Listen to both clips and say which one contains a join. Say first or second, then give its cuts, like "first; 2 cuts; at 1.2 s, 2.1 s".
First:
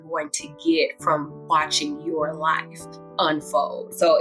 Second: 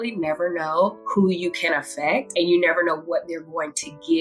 second; 2 cuts; at 1.0 s, 2.3 s